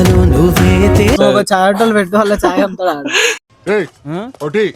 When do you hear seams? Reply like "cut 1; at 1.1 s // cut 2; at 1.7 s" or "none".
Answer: cut 1; at 1.2 s // cut 2; at 3.3 s

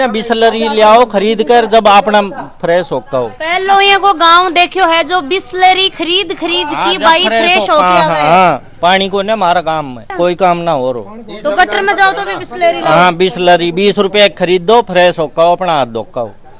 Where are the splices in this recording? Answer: none

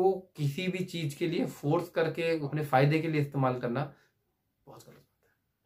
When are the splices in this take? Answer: cut 1; at 2.5 s

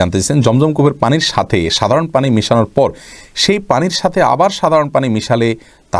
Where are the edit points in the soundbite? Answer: none

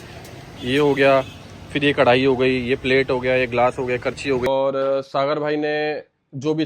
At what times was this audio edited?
cut 1; at 4.5 s

